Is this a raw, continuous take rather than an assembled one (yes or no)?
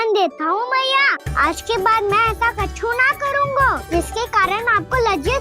no